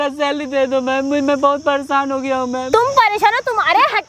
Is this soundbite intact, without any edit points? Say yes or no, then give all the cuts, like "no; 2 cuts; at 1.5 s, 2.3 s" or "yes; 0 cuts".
no; 1 cut; at 2.7 s